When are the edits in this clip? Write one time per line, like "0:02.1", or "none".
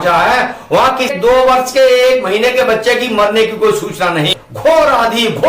0:01.2
0:04.4